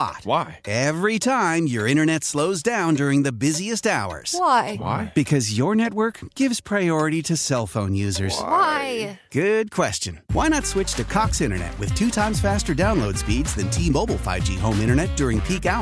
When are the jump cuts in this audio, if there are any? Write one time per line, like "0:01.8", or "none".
none

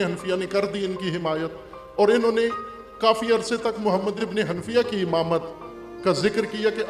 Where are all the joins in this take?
0:04.2

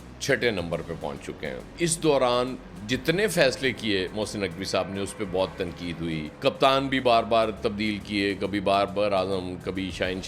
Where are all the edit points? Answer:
0:01.7

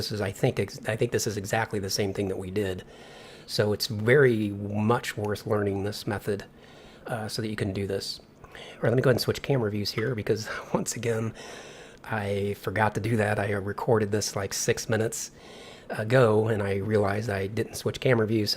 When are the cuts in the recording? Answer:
0:14.1

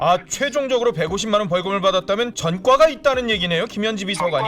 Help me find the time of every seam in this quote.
0:02.4

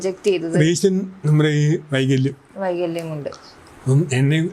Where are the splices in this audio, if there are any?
none

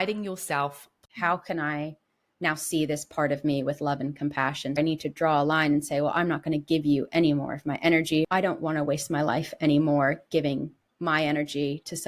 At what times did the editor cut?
0:01.0
0:04.8
0:08.2

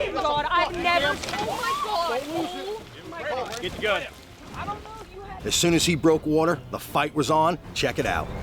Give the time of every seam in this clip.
0:05.4

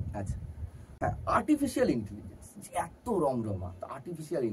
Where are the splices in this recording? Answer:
0:00.9

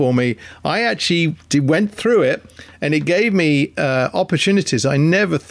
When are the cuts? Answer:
none

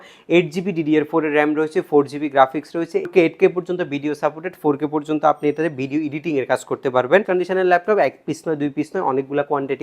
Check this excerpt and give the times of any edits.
0:03.1
0:07.2

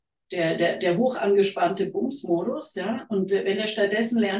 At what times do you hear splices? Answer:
none

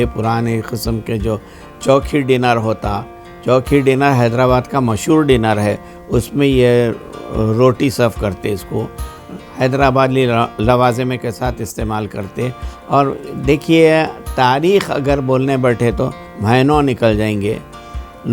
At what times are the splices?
none

